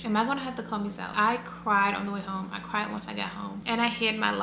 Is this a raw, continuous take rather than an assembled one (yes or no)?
no